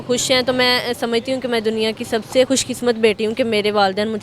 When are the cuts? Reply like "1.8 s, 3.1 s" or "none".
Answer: 2.5 s